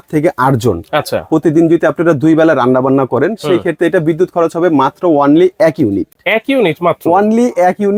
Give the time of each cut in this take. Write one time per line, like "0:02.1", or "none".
none

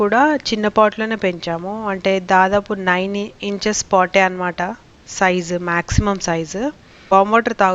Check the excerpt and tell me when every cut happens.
none

